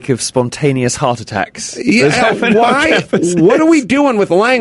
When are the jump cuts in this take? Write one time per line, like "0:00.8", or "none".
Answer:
none